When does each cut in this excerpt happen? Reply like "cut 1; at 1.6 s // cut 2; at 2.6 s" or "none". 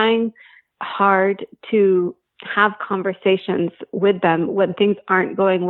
none